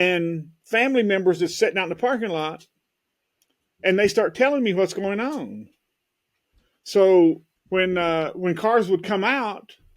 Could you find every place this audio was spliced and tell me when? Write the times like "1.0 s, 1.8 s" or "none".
7.5 s